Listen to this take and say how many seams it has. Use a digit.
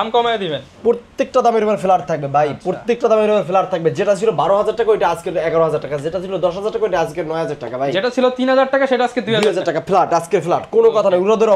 0